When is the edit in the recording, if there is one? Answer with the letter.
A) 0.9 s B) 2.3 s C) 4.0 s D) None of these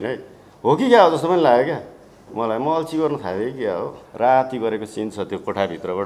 C